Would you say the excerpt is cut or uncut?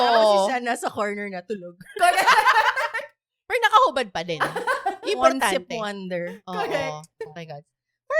uncut